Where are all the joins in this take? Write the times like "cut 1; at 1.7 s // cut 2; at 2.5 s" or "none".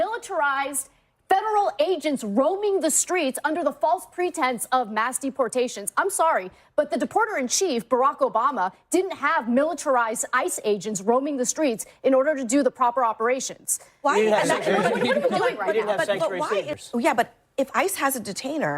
cut 1; at 16.7 s